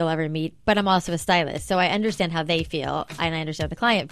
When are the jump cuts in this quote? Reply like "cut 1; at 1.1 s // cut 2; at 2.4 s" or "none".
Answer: none